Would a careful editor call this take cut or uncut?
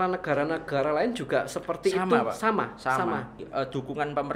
cut